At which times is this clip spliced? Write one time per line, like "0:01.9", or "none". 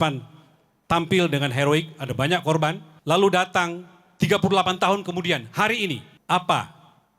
0:02.9
0:06.1